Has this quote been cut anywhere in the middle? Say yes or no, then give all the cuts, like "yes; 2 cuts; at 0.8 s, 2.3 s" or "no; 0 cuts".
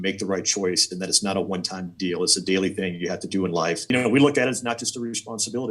yes; 1 cut; at 3.9 s